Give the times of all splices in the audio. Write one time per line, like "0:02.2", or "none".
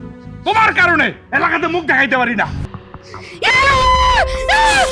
0:02.7